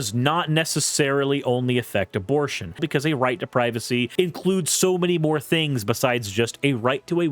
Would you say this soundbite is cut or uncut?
cut